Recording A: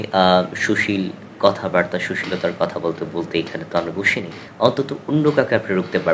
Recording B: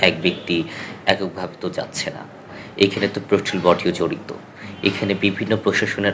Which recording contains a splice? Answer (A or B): A